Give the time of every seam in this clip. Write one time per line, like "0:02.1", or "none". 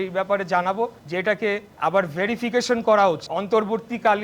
0:01.3
0:03.3